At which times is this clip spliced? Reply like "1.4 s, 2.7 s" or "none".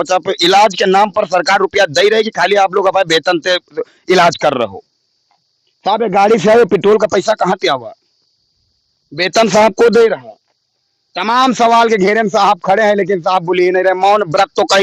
none

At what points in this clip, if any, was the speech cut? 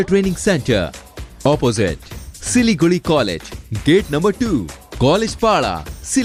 none

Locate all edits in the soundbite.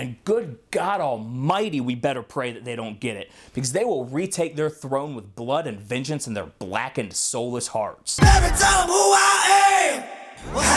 8.0 s

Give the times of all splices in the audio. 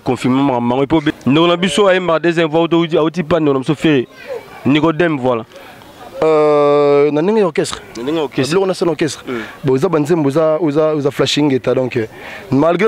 1.2 s

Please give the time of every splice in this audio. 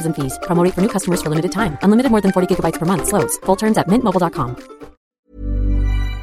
5.1 s

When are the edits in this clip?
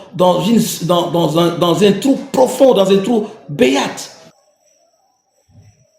4.4 s

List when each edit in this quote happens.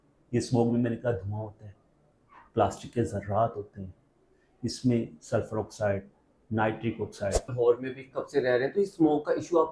7.4 s

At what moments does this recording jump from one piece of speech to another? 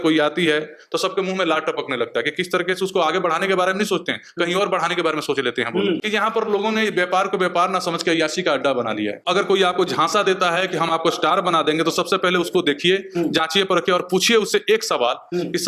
6.0 s, 9.2 s

